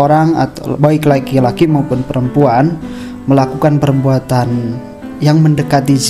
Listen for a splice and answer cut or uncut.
uncut